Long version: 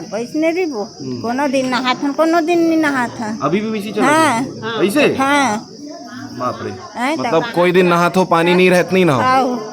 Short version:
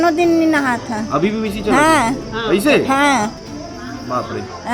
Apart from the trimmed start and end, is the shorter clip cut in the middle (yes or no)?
no